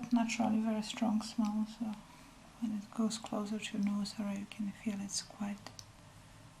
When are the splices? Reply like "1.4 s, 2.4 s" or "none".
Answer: none